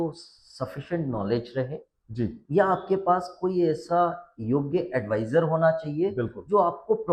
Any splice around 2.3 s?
no; 0 cuts

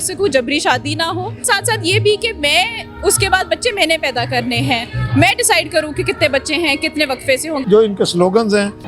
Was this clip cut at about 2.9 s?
no; 2 cuts; at 1.4 s, 7.6 s

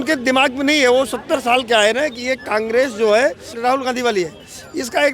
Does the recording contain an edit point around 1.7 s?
no; 1 cut; at 3.5 s

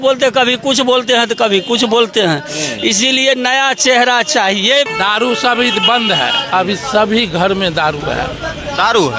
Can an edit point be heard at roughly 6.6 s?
no; 1 cut; at 4.9 s

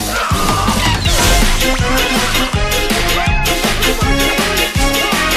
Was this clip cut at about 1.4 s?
no; 1 cut; at 2.7 s

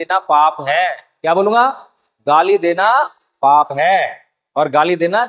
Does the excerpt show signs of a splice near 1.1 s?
no; 0 cuts

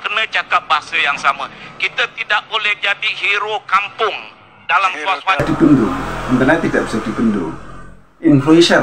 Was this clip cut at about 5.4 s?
yes; 1 cut; at 5.4 s

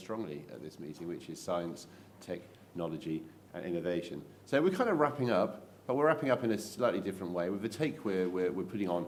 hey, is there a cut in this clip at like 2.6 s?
no; 0 cuts

